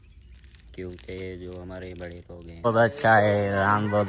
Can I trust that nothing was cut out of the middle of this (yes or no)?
no